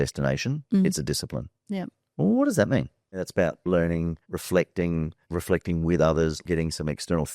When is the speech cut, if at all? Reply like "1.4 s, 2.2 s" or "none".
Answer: 3.2 s, 6.4 s